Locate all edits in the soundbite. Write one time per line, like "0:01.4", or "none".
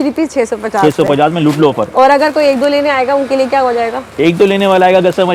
none